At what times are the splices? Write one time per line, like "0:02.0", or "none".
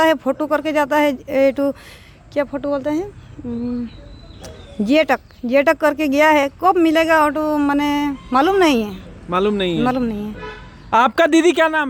none